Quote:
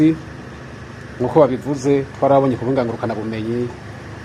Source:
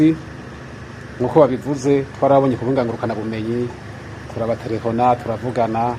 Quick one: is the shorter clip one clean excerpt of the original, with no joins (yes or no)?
yes